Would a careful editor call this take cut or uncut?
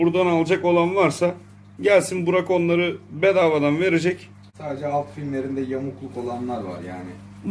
uncut